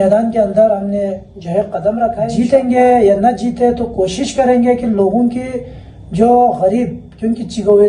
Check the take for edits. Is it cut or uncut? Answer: cut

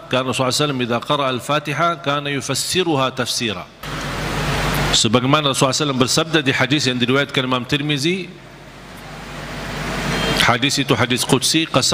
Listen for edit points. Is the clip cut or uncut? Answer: cut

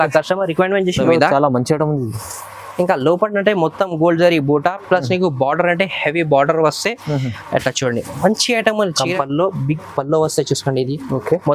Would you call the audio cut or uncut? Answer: cut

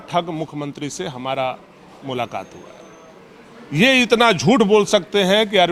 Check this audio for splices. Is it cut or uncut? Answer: uncut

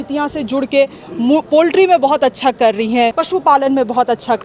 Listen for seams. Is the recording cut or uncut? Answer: cut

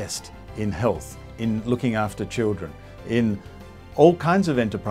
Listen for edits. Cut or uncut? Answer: uncut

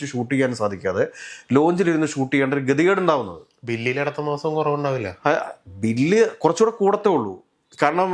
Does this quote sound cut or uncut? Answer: uncut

